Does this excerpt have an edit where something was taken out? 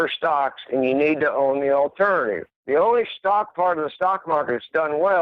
yes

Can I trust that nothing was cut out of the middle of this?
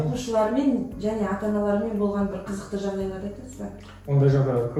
yes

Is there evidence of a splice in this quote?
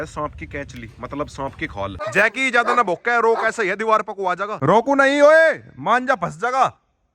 yes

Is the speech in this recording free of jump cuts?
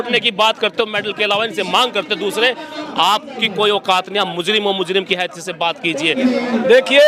no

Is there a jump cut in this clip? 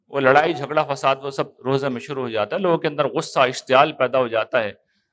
no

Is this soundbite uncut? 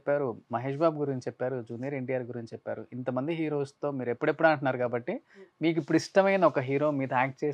yes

